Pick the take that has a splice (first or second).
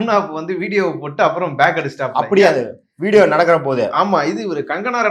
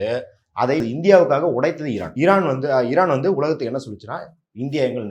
second